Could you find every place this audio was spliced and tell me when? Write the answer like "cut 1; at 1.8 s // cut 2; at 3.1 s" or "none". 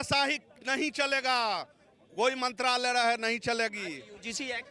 none